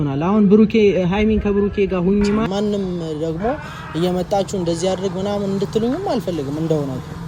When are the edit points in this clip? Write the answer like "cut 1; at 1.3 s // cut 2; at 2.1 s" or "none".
cut 1; at 2.5 s